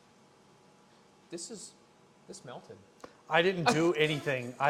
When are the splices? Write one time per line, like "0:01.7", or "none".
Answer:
none